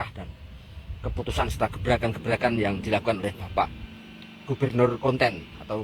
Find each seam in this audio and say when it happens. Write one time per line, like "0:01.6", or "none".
none